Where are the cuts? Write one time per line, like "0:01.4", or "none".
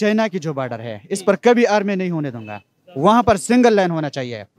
none